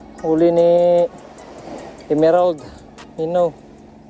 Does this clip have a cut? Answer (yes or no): no